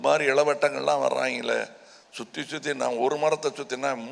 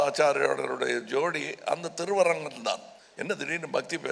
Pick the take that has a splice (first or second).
second